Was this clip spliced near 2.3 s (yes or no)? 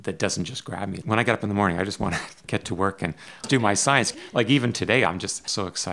yes